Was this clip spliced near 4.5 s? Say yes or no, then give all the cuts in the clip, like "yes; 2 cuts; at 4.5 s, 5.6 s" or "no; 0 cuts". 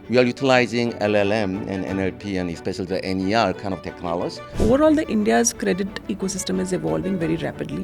yes; 1 cut; at 4.5 s